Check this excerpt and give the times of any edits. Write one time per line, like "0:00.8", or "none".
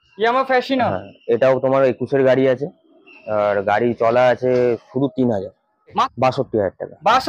0:06.1